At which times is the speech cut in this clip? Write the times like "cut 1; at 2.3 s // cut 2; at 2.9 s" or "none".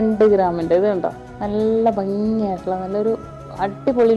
cut 1; at 1.3 s